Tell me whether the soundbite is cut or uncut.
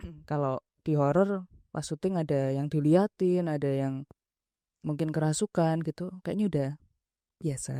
uncut